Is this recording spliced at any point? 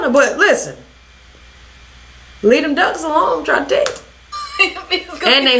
no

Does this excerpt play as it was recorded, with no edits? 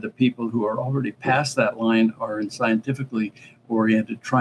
yes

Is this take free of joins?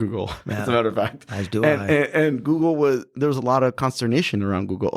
yes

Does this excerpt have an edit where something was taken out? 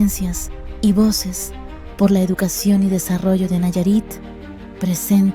no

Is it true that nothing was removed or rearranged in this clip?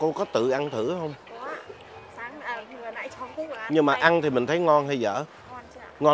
yes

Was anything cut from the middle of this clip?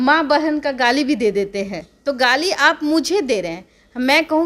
no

